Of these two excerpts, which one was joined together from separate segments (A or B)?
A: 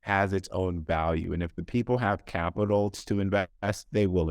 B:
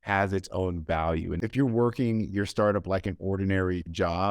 B